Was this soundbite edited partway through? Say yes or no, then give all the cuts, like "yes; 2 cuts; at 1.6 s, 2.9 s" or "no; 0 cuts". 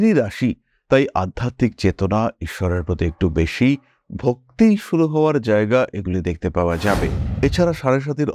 yes; 1 cut; at 7.2 s